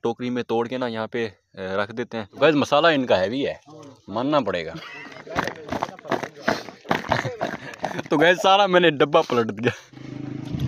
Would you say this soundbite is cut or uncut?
cut